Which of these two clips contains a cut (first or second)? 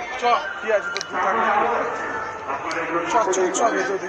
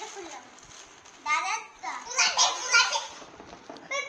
second